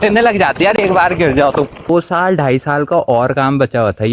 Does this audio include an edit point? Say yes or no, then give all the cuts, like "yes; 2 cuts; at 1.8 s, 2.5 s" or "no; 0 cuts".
yes; 1 cut; at 1.9 s